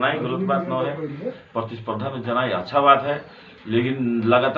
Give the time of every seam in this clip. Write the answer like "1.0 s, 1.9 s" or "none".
none